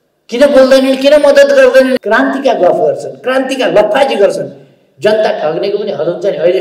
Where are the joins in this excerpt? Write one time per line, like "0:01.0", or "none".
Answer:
0:02.0